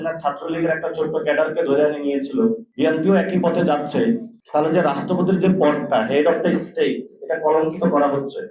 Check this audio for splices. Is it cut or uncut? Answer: cut